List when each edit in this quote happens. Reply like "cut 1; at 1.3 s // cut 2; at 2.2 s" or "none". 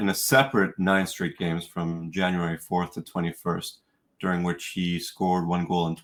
none